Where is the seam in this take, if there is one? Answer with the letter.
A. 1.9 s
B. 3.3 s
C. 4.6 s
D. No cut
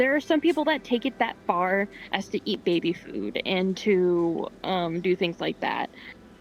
D